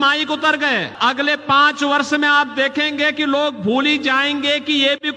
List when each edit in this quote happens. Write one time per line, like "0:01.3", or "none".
0:00.9